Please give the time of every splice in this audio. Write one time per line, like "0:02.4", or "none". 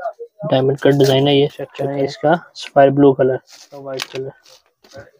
0:01.8
0:03.7